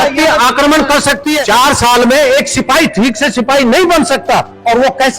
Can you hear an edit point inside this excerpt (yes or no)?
yes